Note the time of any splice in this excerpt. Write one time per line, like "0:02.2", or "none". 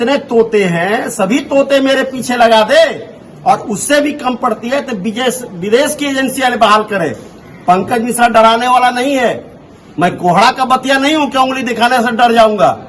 none